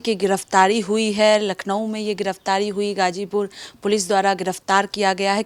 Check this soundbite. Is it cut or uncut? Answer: uncut